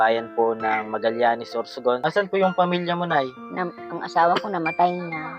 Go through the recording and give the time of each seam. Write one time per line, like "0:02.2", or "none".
0:02.0